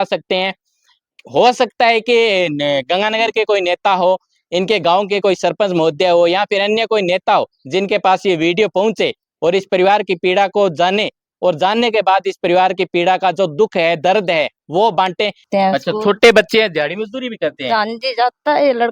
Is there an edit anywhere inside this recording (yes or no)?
yes